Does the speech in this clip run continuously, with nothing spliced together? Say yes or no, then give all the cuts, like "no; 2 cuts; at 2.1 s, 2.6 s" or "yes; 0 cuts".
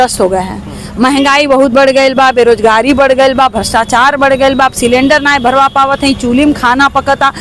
yes; 0 cuts